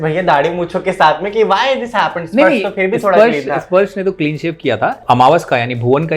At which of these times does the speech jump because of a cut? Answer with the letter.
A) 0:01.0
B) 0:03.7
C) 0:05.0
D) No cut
C